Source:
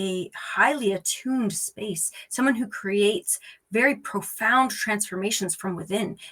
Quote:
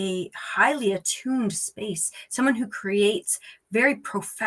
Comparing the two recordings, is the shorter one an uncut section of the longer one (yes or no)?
yes